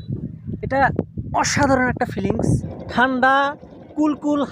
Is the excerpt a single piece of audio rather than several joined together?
no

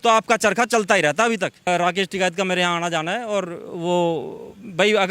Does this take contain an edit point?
yes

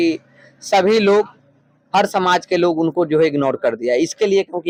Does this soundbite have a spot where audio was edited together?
no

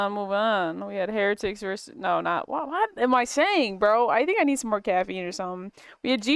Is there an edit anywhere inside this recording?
no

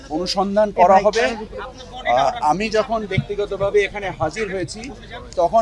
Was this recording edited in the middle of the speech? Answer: no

